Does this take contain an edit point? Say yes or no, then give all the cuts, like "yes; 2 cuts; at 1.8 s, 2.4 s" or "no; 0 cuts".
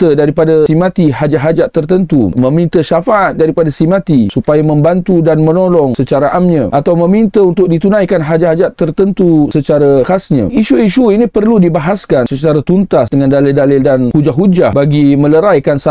no; 0 cuts